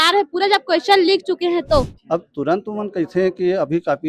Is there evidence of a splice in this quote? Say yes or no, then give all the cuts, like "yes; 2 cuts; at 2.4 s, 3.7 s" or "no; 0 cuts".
yes; 1 cut; at 2.0 s